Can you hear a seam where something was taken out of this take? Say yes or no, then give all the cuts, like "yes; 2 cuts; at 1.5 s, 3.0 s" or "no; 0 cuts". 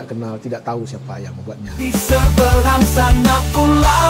yes; 1 cut; at 1.8 s